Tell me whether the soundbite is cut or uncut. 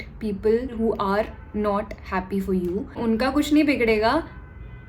cut